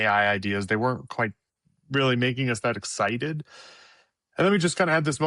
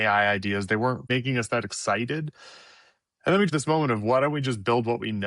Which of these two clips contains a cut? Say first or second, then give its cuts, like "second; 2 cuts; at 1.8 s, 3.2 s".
second; 2 cuts; at 1.1 s, 3.5 s